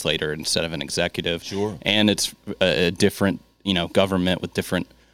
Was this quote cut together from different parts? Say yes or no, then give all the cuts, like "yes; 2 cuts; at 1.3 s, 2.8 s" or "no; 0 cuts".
no; 0 cuts